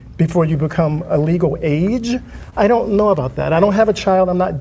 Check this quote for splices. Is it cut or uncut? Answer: uncut